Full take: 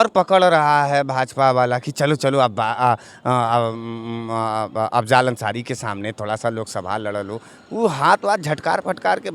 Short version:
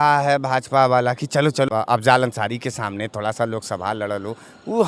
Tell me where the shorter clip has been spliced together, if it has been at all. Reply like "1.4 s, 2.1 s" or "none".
1.7 s